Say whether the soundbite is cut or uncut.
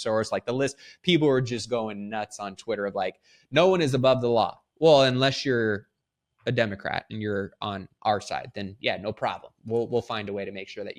uncut